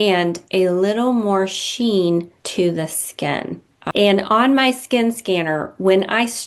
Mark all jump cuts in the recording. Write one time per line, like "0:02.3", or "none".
0:03.8